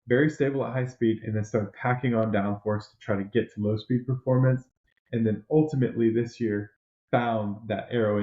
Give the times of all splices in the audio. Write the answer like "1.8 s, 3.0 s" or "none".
none